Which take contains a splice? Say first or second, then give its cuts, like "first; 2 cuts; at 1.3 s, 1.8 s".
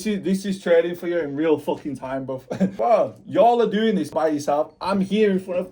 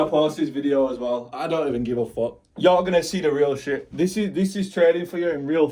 first; 2 cuts; at 2.7 s, 4.1 s